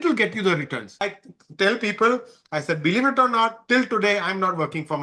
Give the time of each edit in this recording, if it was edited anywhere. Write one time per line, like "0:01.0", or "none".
0:01.1